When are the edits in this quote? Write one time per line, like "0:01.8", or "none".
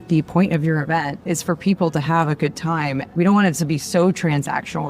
0:01.2
0:03.1